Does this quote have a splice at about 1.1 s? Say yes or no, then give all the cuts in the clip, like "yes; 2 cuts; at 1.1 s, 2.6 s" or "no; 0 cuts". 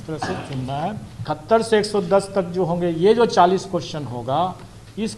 yes; 1 cut; at 1.1 s